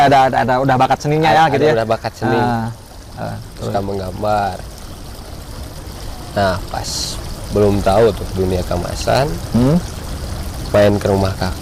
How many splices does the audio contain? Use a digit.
0